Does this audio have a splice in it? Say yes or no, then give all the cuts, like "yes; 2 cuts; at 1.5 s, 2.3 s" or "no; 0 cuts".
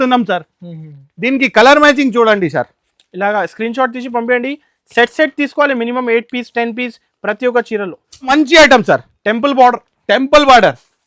yes; 1 cut; at 8.3 s